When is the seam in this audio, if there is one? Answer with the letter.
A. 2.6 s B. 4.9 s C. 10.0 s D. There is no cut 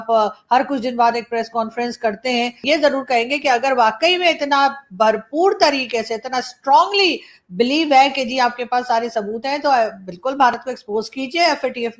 A